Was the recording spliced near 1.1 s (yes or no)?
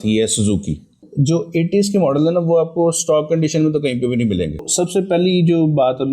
yes